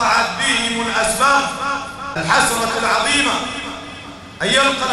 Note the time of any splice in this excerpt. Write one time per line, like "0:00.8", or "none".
0:02.0